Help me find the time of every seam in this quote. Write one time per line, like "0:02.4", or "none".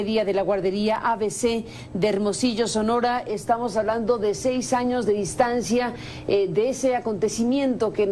none